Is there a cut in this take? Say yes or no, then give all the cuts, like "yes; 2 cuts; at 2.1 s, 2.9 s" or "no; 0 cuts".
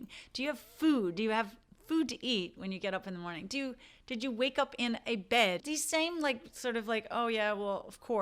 no; 0 cuts